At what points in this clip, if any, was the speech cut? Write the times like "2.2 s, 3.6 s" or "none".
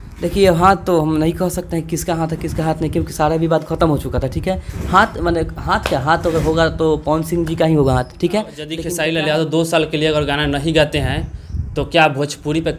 8.8 s